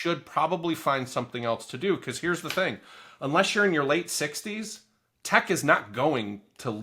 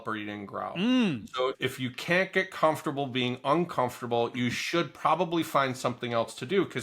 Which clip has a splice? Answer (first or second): second